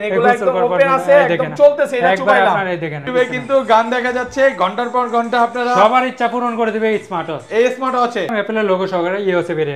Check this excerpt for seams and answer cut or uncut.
cut